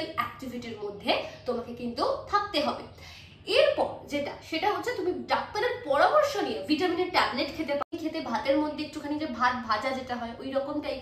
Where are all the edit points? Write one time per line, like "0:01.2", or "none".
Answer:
0:07.9